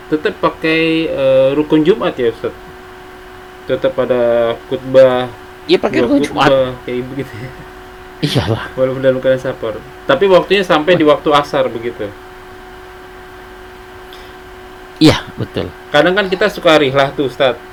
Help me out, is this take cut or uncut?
uncut